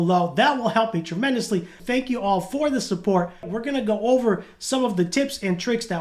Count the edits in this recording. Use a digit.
2